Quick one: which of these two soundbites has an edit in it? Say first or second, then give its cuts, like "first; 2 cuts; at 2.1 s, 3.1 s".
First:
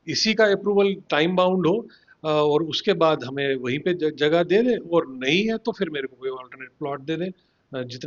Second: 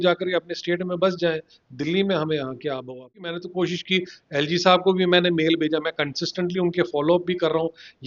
second; 1 cut; at 3.3 s